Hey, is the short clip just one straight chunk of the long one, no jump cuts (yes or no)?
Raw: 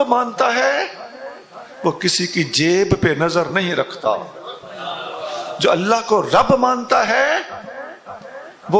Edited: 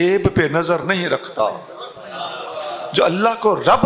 yes